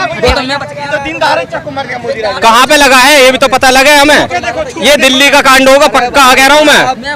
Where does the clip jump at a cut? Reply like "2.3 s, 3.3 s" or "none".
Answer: none

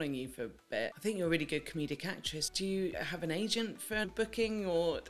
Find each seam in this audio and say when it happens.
0.9 s, 2.9 s, 4.0 s

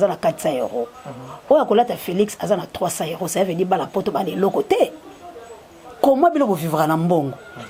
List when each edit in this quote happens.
none

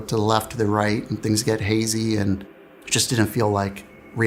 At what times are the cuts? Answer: none

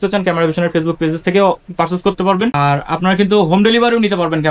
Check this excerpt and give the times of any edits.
2.6 s

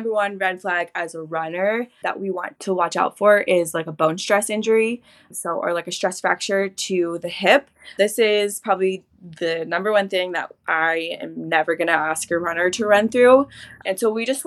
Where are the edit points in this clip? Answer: 1.9 s

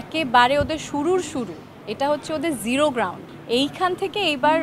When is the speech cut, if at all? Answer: none

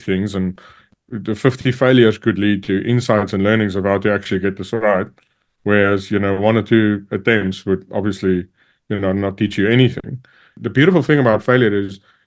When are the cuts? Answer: 10.6 s

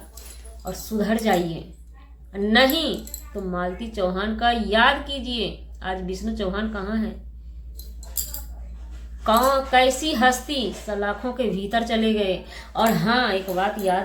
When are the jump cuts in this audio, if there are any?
none

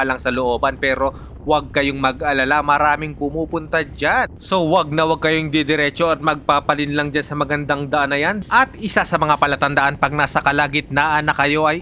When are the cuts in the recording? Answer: 4.3 s, 8.4 s

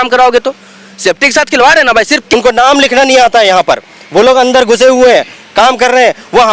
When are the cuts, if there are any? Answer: 2.3 s

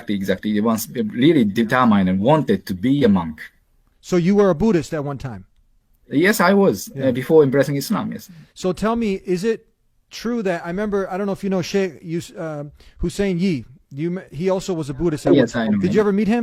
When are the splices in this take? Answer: none

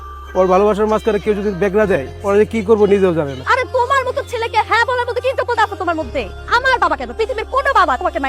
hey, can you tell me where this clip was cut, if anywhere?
3.4 s

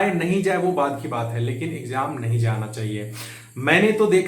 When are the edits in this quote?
none

